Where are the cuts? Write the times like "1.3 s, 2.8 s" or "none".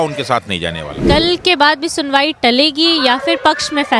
1.0 s